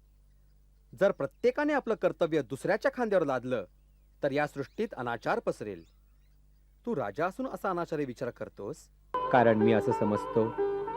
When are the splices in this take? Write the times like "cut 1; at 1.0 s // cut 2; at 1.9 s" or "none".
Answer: cut 1; at 9.1 s